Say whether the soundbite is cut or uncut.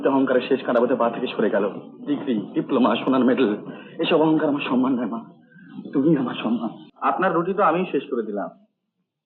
cut